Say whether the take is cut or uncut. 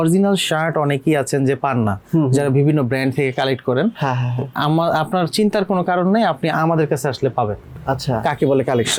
uncut